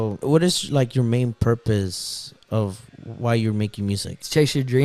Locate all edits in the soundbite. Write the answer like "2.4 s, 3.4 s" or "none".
none